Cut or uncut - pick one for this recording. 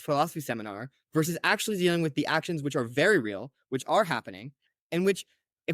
cut